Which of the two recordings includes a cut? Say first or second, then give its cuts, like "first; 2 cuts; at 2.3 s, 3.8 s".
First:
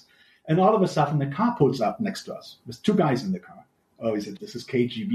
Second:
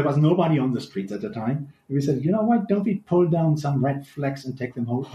first; 1 cut; at 4.1 s